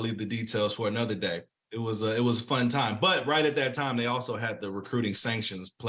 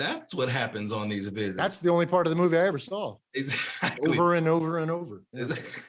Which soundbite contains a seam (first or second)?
first